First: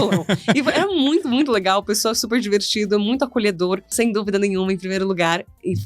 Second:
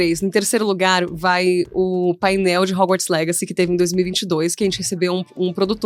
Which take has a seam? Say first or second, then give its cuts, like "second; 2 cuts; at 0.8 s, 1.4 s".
first; 1 cut; at 3.9 s